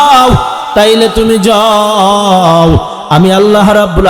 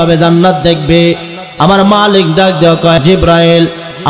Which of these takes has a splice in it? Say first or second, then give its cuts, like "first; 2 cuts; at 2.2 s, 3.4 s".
second; 1 cut; at 3.0 s